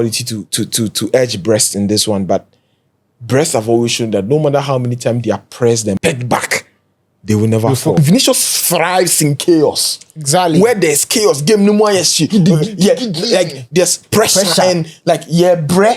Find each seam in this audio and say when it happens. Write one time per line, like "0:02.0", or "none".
0:06.0
0:08.0